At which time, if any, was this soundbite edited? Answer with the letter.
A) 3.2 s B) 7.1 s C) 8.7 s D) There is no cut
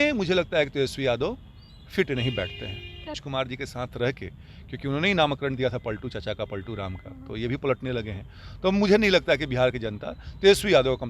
A